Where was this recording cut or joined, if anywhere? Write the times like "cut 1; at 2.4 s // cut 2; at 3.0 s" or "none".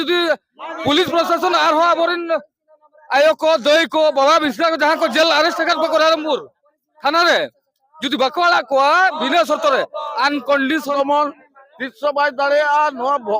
cut 1; at 10.9 s